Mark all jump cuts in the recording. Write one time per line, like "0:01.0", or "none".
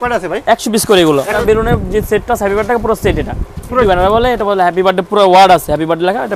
0:01.4
0:03.8